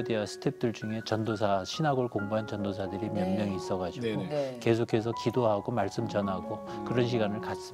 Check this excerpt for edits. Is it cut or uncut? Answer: uncut